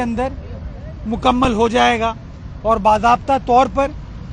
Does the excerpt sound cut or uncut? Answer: uncut